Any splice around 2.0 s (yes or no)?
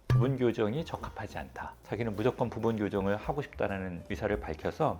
yes